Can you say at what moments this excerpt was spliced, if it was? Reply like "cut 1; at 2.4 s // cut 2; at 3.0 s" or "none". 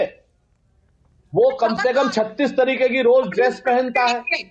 cut 1; at 1.8 s